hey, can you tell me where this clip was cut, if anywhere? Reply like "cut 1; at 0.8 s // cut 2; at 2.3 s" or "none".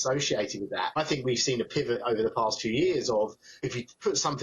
cut 1; at 1.0 s // cut 2; at 3.6 s

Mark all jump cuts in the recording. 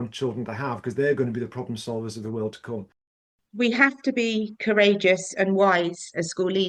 cut 1; at 3.2 s

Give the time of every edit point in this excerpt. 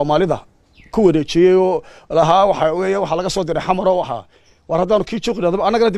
none

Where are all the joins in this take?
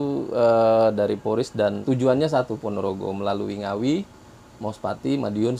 cut 1; at 1.8 s

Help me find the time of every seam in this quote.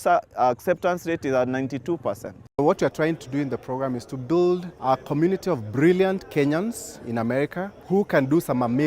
cut 1; at 2.5 s // cut 2; at 4.7 s // cut 3; at 7.8 s

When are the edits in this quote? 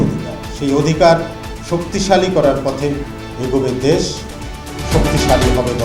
none

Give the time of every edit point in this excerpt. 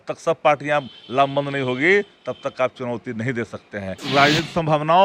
cut 1; at 4.0 s

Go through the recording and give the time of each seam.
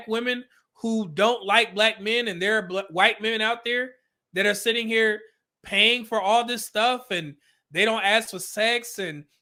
none

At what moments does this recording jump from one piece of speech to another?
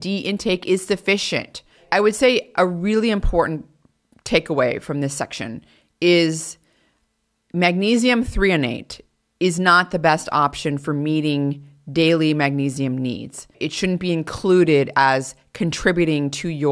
cut 1; at 1.8 s // cut 2; at 13.5 s

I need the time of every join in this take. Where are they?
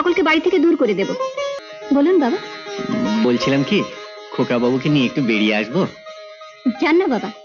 cut 1; at 1.6 s

